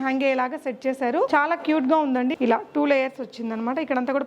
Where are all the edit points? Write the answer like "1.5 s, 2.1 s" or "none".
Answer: 1.3 s, 2.3 s